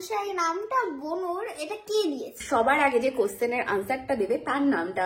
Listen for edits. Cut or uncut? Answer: cut